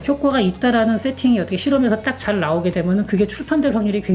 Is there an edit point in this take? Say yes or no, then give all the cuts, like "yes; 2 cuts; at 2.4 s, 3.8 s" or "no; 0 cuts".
no; 0 cuts